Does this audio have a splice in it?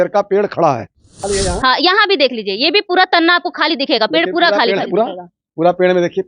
yes; 1 cut; at 1.2 s

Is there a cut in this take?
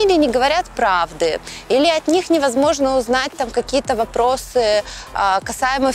no; 0 cuts

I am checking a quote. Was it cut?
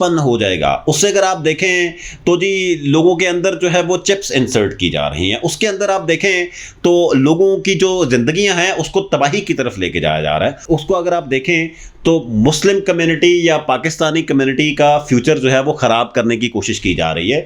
no; 0 cuts

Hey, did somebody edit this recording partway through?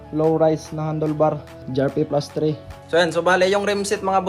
yes; 2 cuts; at 1.6 s, 2.7 s

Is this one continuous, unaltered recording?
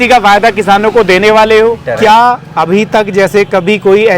no; 1 cut; at 1.8 s

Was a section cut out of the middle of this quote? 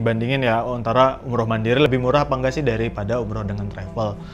yes; 1 cut; at 1.9 s

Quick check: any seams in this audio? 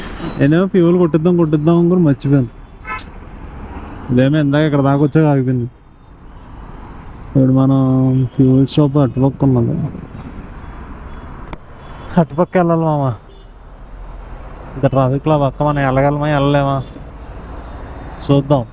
no; 0 cuts

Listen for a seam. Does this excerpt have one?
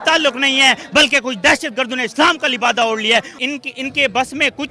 yes; 1 cut; at 3.3 s

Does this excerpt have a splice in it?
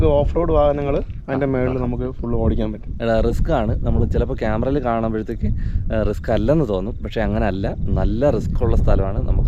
yes; 1 cut; at 2.9 s

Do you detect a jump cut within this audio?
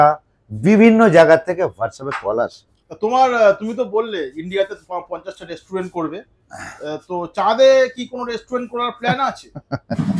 no; 0 cuts

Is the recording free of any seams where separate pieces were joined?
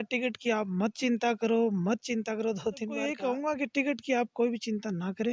no; 1 cut; at 3.1 s

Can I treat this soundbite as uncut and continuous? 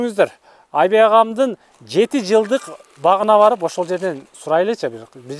yes; 0 cuts

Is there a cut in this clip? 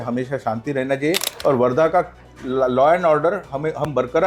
yes; 1 cut; at 1.3 s

